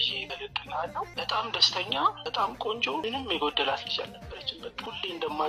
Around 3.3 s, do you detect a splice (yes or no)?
no